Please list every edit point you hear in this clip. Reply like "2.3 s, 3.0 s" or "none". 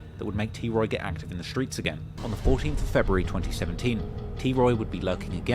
2.0 s